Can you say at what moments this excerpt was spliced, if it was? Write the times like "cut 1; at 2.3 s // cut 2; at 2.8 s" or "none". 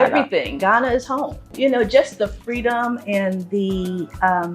cut 1; at 1.4 s